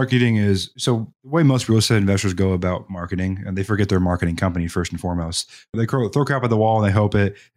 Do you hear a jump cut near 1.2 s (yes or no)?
no